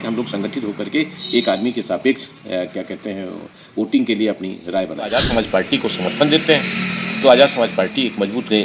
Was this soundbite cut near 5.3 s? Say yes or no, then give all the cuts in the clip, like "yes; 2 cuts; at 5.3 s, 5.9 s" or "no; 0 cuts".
yes; 1 cut; at 5.3 s